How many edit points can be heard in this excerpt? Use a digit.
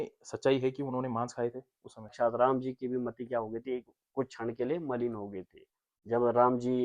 1